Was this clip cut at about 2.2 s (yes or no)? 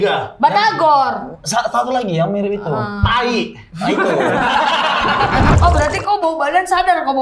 no